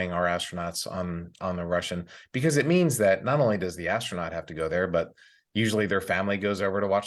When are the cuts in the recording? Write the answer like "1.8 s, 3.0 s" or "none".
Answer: none